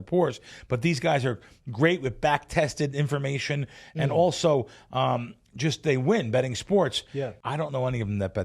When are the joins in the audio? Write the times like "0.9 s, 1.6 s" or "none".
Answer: 7.4 s